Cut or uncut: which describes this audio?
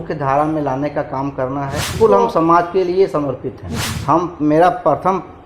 cut